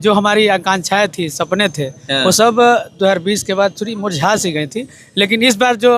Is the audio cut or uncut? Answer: uncut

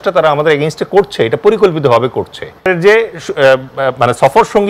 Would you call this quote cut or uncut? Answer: cut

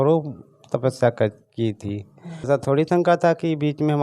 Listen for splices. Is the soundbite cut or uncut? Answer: cut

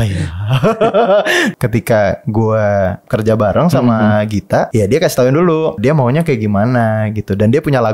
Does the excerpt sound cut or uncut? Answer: cut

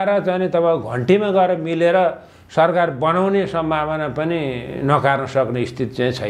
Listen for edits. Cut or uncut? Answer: uncut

